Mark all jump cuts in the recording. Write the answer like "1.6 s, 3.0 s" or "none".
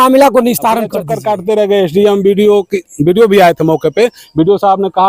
1.1 s

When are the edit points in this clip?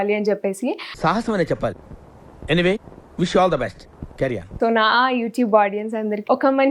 4.4 s

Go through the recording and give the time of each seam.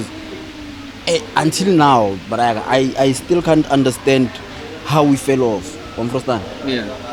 none

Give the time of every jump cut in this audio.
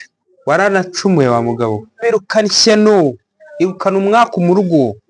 2.0 s

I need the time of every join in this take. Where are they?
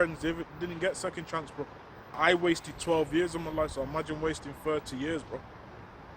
2.2 s

